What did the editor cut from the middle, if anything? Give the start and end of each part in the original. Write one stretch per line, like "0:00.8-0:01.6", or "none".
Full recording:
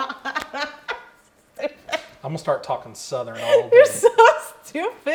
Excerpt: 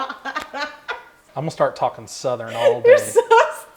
0:01.2-0:02.1